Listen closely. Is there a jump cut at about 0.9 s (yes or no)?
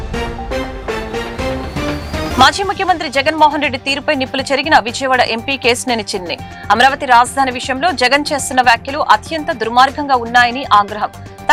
no